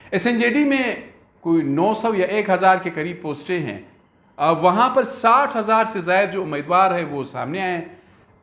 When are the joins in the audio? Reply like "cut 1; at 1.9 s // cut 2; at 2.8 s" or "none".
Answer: none